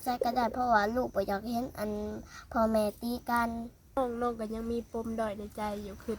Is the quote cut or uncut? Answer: cut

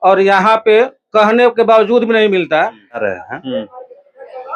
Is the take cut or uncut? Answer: cut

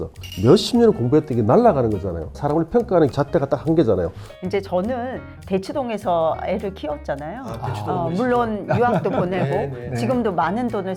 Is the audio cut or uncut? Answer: uncut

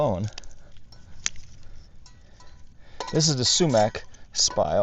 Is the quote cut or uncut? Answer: cut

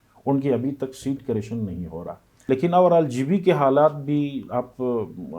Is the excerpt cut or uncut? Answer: cut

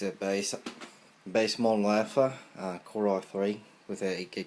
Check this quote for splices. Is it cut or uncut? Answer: cut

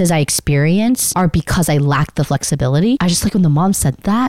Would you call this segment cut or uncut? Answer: cut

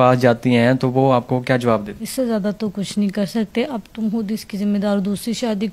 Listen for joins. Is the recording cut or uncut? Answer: cut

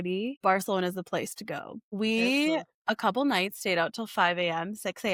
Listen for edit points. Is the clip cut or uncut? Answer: uncut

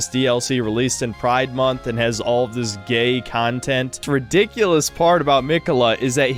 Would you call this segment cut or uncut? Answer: cut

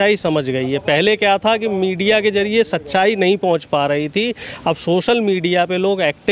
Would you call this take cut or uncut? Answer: uncut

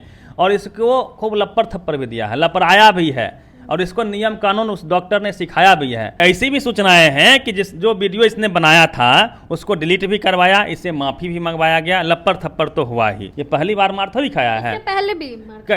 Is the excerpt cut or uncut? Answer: cut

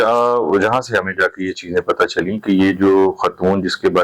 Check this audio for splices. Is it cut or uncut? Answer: uncut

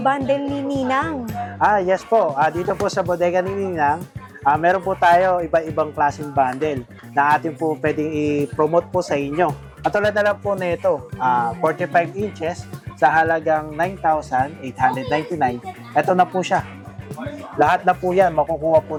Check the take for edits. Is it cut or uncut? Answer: uncut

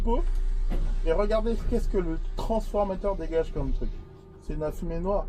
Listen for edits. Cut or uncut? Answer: uncut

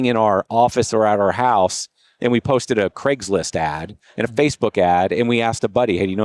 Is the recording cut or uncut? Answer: uncut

